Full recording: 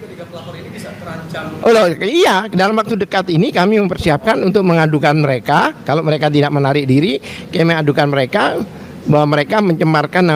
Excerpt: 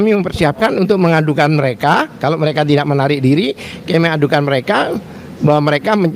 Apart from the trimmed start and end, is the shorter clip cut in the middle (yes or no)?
no